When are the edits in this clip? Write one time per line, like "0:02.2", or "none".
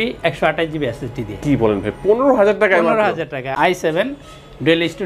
0:03.5